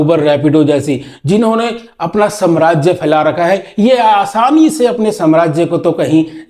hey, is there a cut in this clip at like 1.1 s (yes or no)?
no